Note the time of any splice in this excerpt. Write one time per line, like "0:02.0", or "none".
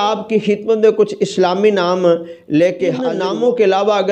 0:03.1